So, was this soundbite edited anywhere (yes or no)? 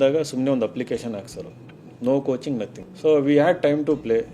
yes